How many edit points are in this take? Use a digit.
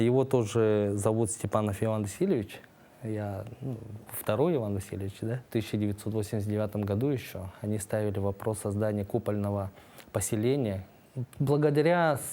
2